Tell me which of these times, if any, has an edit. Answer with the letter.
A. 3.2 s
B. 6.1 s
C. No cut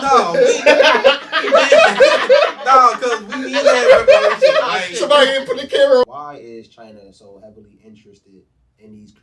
B